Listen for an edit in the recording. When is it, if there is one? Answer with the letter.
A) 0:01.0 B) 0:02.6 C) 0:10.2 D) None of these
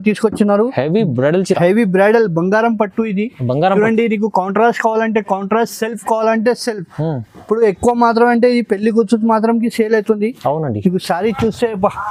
D